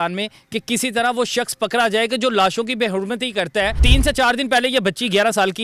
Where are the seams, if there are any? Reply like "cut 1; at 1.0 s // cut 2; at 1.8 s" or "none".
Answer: cut 1; at 3.8 s